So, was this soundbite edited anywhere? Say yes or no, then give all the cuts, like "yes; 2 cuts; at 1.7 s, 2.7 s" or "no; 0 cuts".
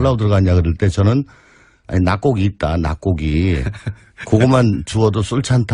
yes; 1 cut; at 2.2 s